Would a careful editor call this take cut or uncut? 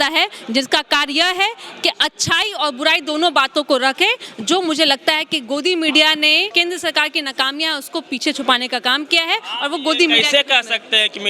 cut